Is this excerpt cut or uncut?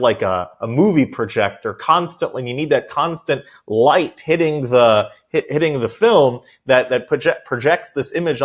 uncut